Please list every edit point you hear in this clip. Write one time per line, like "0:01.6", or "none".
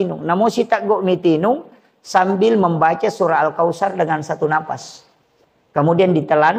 none